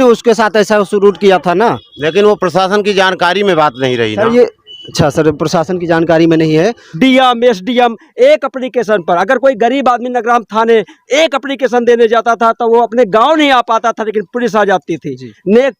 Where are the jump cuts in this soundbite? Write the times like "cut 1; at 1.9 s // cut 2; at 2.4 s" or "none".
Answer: cut 1; at 6.9 s // cut 2; at 8.6 s